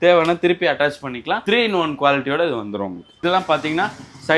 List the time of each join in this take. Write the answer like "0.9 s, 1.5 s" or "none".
3.2 s